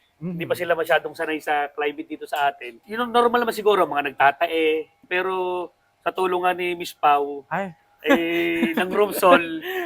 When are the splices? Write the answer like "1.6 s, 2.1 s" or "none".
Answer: 2.7 s, 5.0 s

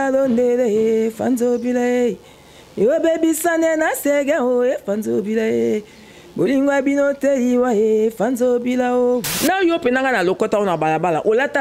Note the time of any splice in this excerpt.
9.3 s

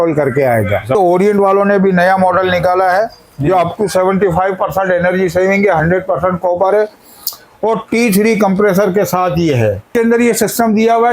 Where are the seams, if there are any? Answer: 1.0 s, 9.9 s

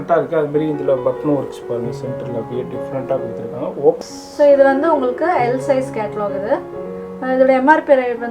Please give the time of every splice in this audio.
4.0 s

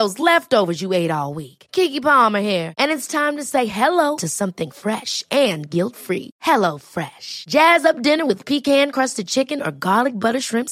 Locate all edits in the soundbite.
none

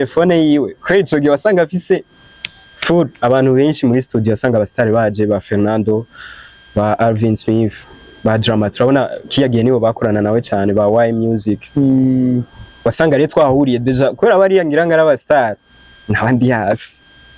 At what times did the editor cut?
none

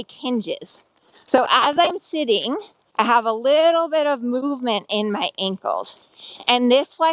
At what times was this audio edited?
2.8 s

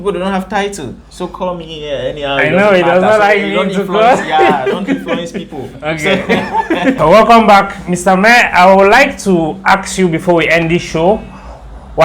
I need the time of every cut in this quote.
7.0 s

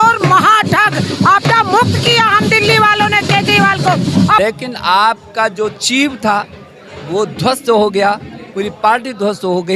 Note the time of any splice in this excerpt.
4.4 s

